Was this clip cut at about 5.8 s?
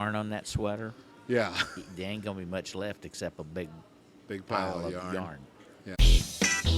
yes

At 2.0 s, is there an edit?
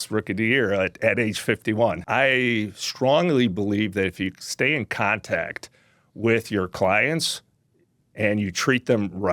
yes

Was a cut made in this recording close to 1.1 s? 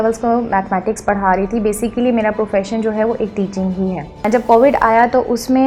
no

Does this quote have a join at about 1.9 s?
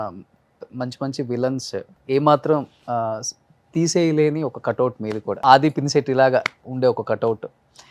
yes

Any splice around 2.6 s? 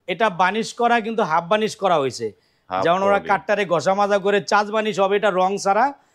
no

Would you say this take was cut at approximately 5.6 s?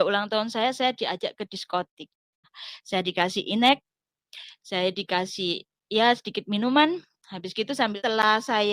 no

